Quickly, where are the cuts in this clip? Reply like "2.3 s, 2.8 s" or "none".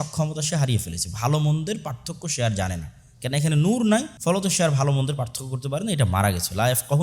4.1 s